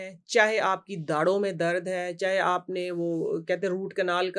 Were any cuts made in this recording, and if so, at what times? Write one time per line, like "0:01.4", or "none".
none